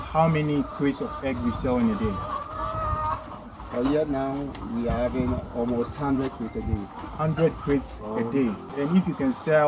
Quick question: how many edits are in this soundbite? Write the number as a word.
one